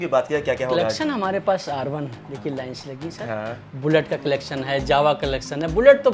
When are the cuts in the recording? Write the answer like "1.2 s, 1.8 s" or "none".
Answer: none